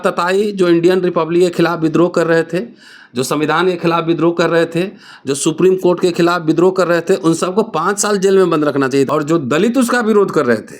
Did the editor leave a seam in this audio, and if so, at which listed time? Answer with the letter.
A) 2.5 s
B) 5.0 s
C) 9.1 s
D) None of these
C